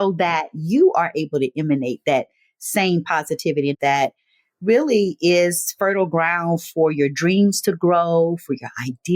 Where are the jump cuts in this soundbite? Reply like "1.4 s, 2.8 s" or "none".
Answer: 3.8 s